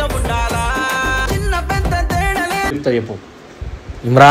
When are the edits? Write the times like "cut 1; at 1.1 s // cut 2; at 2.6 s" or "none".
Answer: cut 1; at 2.7 s